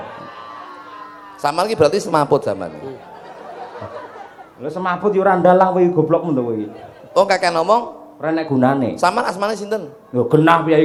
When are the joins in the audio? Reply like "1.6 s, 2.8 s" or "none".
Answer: none